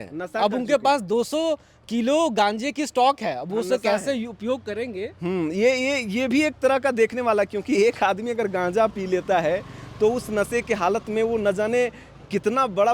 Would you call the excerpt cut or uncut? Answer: uncut